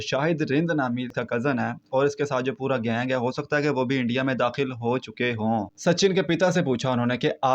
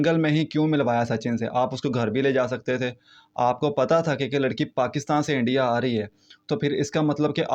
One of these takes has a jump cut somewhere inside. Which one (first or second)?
first